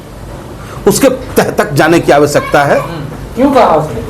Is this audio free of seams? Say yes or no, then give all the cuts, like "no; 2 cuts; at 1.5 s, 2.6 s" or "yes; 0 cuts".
yes; 0 cuts